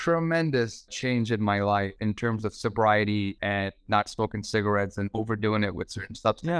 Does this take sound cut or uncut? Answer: cut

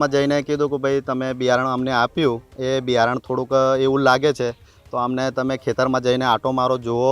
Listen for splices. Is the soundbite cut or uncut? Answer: uncut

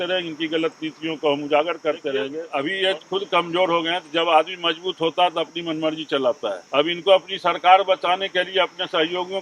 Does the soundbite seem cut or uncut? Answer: cut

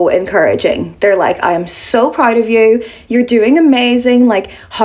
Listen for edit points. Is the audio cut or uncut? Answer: uncut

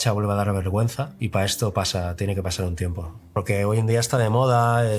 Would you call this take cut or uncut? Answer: cut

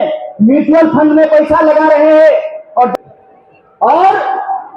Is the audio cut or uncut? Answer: cut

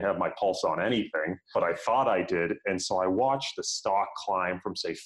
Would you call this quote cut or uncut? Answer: uncut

